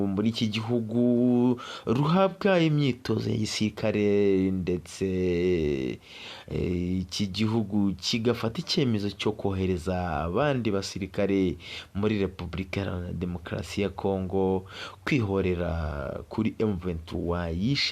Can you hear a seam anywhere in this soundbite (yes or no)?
no